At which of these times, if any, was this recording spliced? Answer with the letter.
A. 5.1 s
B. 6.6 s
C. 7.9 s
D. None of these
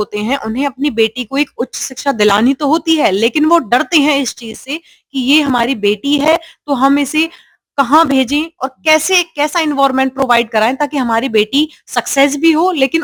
D